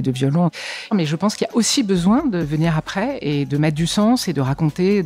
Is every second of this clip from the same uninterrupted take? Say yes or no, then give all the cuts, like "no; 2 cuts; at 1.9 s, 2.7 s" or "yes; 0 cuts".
no; 2 cuts; at 0.9 s, 2.5 s